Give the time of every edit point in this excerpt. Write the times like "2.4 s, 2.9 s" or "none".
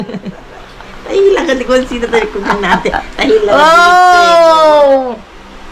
none